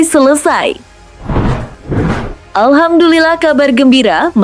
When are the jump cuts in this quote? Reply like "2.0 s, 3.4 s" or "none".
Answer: 1.0 s, 2.4 s